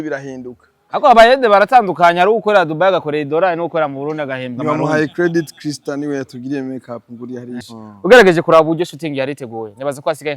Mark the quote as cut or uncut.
cut